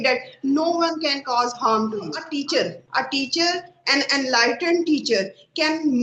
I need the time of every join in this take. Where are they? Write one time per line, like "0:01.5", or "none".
0:02.2